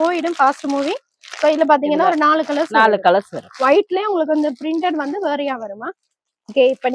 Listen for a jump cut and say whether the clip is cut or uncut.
uncut